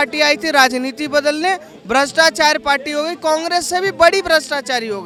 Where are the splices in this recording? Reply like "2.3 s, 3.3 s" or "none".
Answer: none